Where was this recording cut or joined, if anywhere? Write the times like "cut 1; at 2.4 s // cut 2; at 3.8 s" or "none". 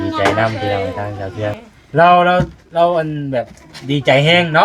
cut 1; at 1.6 s